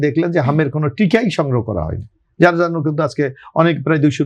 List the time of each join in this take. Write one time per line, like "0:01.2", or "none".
none